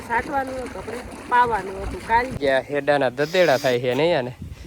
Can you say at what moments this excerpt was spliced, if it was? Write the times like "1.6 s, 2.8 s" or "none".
2.4 s